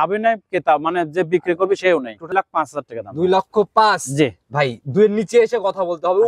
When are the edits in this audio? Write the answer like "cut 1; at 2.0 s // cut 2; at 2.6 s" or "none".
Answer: cut 1; at 2.3 s